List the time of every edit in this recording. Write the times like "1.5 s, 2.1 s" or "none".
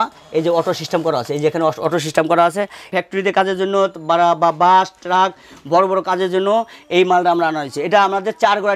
2.9 s